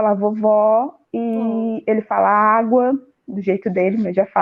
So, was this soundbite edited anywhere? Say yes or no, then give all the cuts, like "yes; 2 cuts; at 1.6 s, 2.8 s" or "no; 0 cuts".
no; 0 cuts